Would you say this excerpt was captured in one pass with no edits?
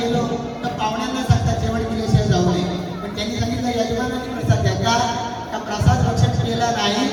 yes; 0 cuts

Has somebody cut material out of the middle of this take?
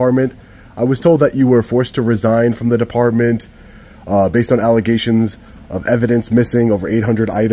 no; 0 cuts

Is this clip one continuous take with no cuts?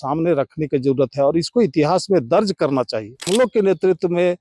no; 1 cut; at 3.2 s

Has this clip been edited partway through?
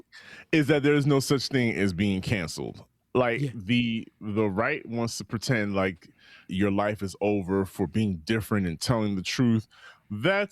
yes; 1 cut; at 6.5 s

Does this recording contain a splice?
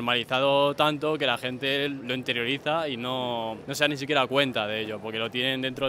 no; 0 cuts

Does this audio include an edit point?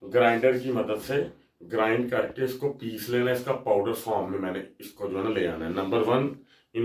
no; 0 cuts

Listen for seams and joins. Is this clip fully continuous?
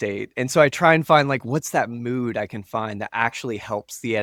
yes; 0 cuts

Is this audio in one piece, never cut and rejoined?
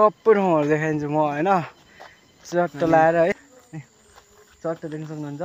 no; 1 cut; at 3.5 s

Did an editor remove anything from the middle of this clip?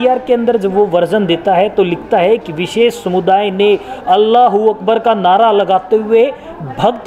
no; 0 cuts

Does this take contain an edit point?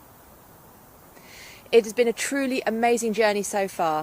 yes; 1 cut; at 3.1 s

